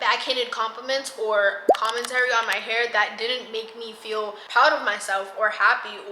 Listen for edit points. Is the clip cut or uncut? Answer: cut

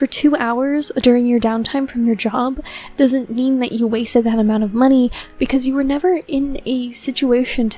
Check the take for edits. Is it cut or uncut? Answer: uncut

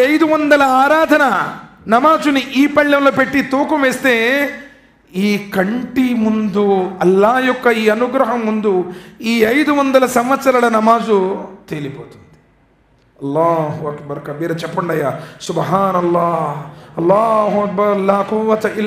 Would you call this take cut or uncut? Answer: uncut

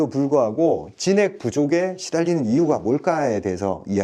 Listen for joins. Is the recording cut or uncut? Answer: uncut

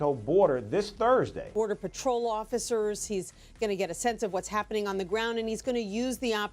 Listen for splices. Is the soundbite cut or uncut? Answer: uncut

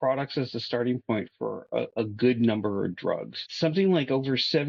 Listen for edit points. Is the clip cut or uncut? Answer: cut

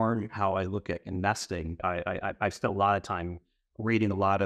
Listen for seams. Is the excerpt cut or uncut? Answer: cut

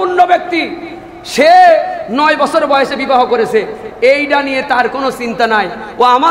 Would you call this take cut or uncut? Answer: uncut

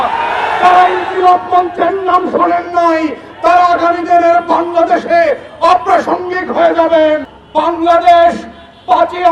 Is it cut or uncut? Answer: cut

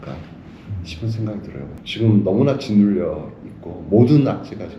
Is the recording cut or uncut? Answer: cut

